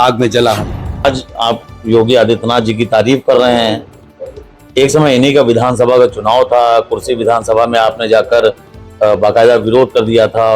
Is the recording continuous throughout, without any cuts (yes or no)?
no